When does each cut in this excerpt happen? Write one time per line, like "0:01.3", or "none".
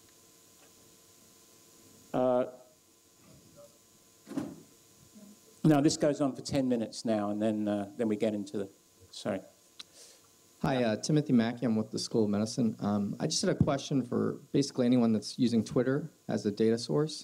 0:12.8